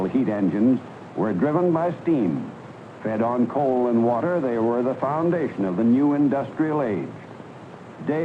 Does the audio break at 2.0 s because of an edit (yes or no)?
yes